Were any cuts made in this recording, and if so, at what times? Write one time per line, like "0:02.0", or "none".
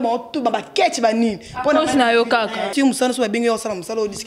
0:02.7